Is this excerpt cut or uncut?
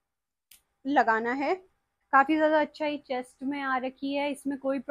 cut